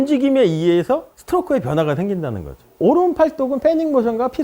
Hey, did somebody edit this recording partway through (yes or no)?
no